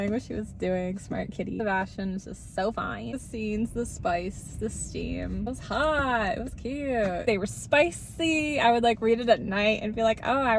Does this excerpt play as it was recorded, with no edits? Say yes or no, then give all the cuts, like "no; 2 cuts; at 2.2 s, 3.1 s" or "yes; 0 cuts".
no; 3 cuts; at 1.6 s, 3.1 s, 7.2 s